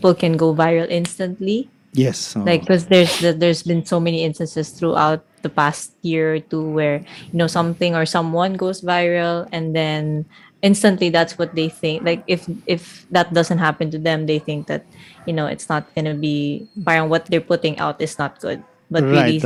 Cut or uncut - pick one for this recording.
uncut